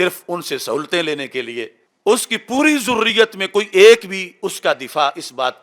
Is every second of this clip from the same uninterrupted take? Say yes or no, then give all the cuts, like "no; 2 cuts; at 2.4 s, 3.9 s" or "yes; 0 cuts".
no; 1 cut; at 1.8 s